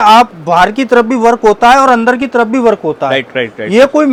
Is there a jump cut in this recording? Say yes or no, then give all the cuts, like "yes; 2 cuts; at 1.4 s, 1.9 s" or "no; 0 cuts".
no; 0 cuts